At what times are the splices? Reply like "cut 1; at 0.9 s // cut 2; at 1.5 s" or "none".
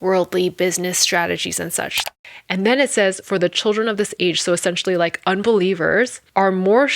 cut 1; at 2.1 s

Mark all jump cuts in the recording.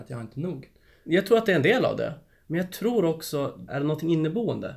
cut 1; at 1.0 s // cut 2; at 3.6 s

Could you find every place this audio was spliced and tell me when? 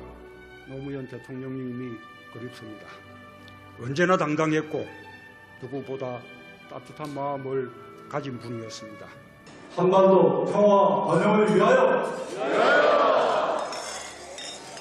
none

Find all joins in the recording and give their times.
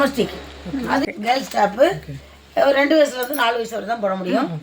cut 1; at 1.0 s

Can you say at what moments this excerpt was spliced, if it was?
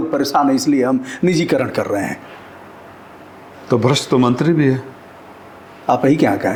none

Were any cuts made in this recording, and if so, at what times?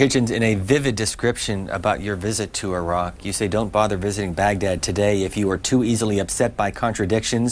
cut 1; at 1.4 s

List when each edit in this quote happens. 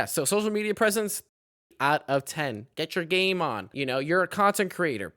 cut 1; at 1.2 s // cut 2; at 2.6 s

